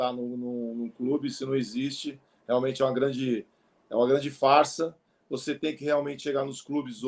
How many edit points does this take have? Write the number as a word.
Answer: zero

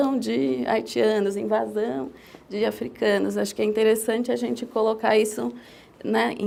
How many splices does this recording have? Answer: zero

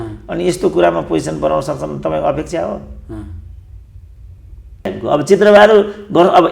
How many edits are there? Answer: one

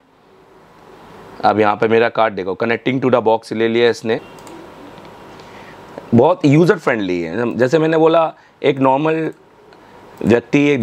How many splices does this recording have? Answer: one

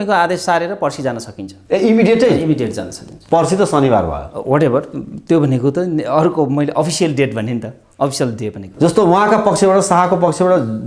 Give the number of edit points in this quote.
zero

